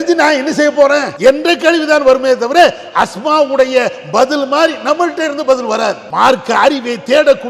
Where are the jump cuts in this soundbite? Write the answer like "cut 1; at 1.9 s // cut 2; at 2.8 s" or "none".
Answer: cut 1; at 1.1 s // cut 2; at 6.0 s